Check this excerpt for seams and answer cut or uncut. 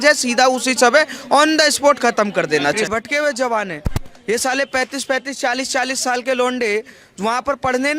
cut